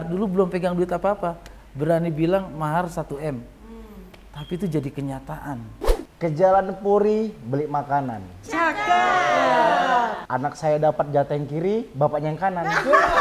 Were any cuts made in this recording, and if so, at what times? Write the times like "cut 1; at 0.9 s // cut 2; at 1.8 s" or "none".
cut 1; at 6.0 s // cut 2; at 10.2 s